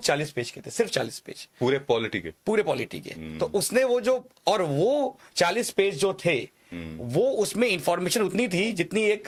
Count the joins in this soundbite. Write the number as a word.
zero